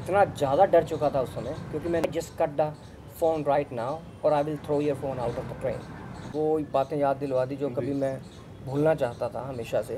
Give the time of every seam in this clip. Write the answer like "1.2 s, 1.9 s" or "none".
2.0 s, 6.2 s

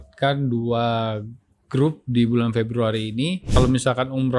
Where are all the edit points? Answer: 3.5 s

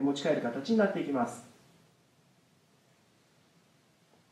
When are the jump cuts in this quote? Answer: none

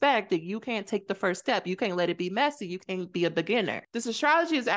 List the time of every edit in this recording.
3.8 s

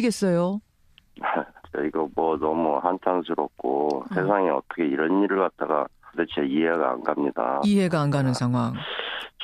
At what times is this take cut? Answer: 6.1 s

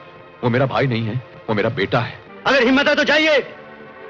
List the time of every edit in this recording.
2.2 s

